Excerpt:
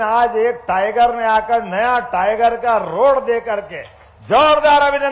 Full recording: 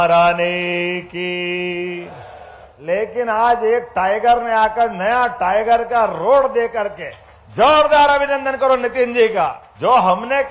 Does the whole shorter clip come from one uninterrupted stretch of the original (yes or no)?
yes